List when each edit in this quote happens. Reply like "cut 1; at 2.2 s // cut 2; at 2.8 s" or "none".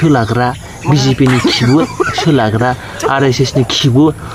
none